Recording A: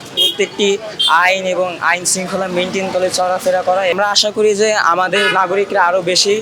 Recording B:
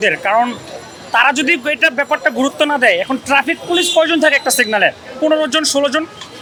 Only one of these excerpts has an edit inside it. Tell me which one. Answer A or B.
A